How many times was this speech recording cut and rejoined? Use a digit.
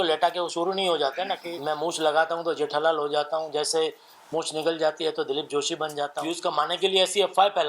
2